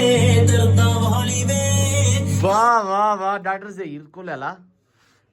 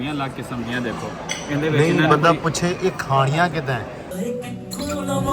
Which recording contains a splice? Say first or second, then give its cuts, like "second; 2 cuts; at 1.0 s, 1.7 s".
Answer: second; 1 cut; at 4.0 s